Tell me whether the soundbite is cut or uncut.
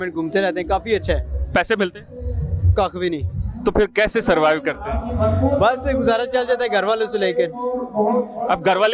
uncut